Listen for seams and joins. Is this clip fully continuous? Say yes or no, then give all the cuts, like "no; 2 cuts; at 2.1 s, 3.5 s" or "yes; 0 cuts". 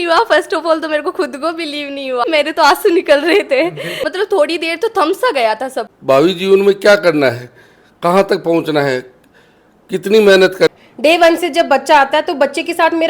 no; 4 cuts; at 2.3 s, 3.9 s, 5.9 s, 10.7 s